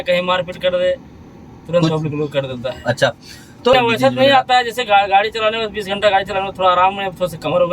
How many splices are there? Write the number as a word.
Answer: one